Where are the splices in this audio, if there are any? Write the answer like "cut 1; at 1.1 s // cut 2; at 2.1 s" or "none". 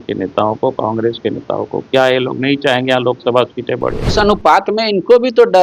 cut 1; at 4.0 s